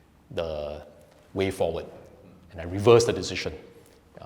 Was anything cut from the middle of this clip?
no; 0 cuts

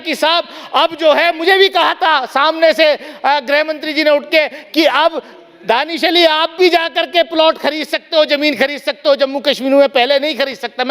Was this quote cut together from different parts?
no; 0 cuts

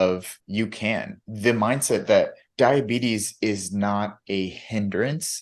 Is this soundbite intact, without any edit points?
yes; 0 cuts

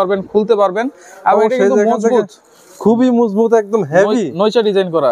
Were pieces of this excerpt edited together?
no; 0 cuts

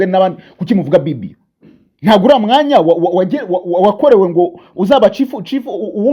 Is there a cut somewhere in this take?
no; 0 cuts

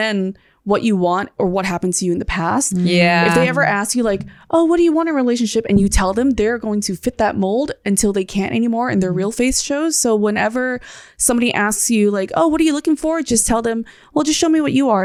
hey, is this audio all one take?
yes; 0 cuts

